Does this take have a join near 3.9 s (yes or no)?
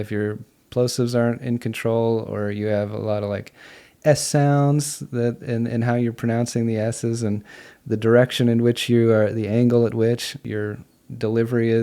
no